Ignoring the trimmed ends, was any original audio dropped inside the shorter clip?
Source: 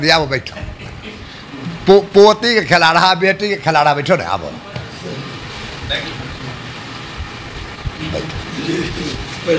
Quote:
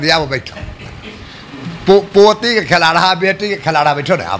no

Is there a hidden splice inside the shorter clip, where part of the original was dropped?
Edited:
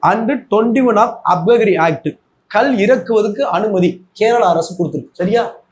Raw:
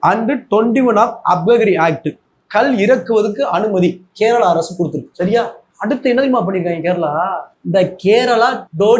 no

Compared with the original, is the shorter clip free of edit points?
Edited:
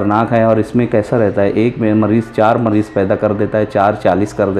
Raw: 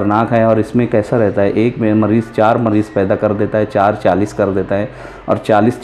yes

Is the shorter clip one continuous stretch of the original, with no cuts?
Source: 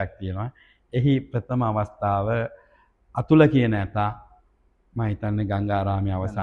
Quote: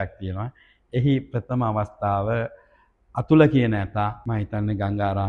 no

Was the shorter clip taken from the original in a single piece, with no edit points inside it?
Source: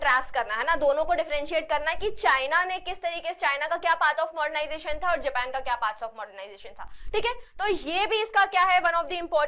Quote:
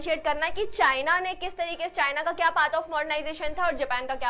yes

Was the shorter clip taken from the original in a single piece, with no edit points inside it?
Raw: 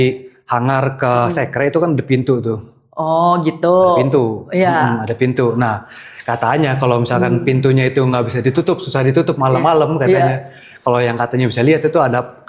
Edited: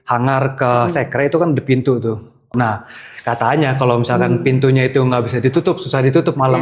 no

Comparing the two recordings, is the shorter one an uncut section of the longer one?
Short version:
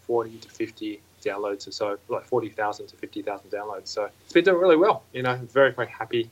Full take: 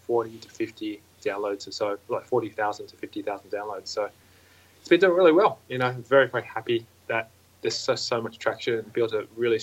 no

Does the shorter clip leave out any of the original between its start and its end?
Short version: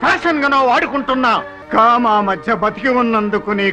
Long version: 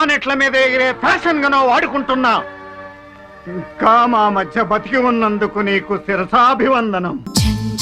yes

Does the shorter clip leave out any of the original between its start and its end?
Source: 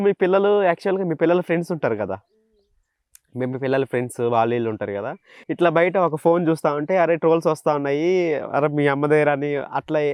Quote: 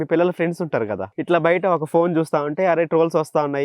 yes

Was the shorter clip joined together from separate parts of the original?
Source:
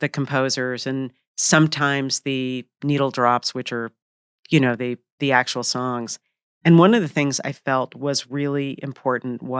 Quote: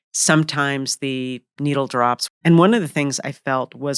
yes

